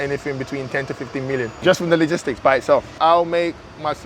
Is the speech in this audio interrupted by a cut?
yes; 2 cuts; at 1.5 s, 2.9 s

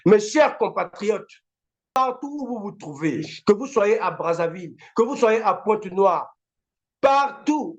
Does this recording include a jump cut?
yes; 1 cut; at 2.0 s

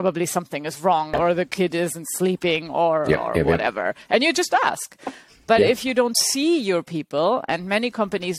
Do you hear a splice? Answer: yes; 1 cut; at 1.2 s

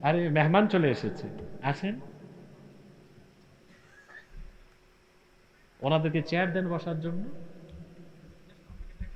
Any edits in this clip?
no; 0 cuts

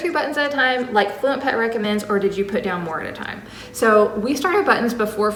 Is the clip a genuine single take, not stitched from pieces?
yes; 0 cuts

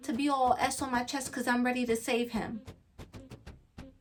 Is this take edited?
no; 0 cuts

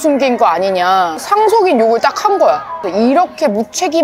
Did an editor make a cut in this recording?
yes; 2 cuts; at 1.2 s, 2.7 s

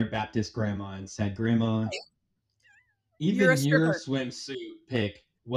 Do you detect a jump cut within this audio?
no; 0 cuts

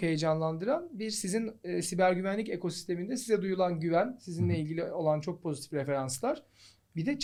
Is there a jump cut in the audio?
no; 0 cuts

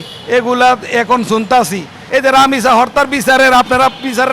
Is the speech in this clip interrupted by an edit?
yes; 1 cut; at 2.0 s

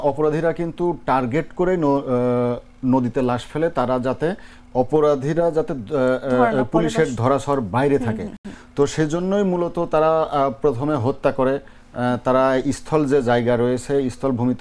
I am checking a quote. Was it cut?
no; 0 cuts

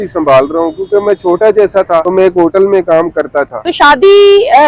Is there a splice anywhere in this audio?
yes; 2 cuts; at 2.1 s, 3.7 s

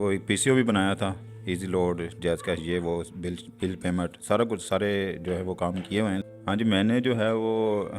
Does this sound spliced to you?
yes; 1 cut; at 6.2 s

